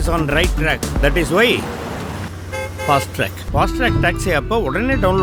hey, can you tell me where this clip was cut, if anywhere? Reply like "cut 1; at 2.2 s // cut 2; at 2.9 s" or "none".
none